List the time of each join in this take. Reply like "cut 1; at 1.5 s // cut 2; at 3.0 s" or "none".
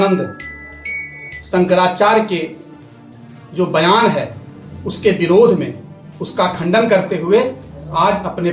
none